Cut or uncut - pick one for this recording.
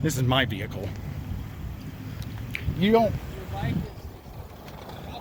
uncut